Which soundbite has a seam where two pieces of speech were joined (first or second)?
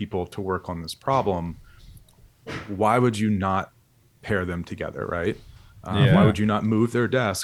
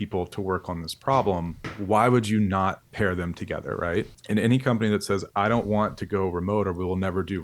second